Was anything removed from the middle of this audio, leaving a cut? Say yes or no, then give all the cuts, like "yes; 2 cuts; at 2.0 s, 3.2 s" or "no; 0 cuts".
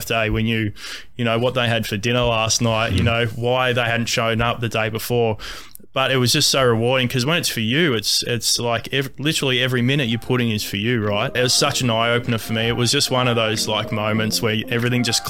yes; 1 cut; at 11.3 s